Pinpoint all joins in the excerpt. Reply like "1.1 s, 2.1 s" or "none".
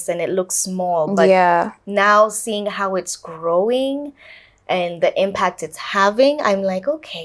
none